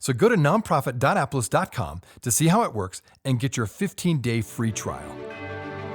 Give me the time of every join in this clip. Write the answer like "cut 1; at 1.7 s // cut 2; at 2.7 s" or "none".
cut 1; at 5.0 s